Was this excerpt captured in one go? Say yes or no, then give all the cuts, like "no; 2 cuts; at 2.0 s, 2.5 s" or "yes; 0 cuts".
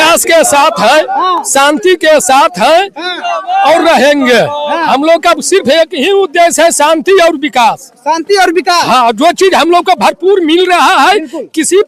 yes; 0 cuts